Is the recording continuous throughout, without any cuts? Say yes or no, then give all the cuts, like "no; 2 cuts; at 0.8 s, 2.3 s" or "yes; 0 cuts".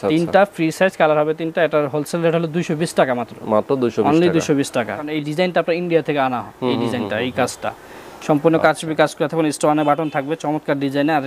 no; 1 cut; at 5.1 s